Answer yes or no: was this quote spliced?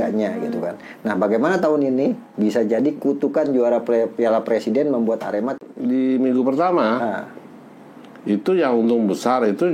yes